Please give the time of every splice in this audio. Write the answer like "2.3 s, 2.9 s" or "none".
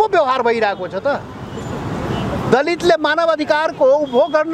none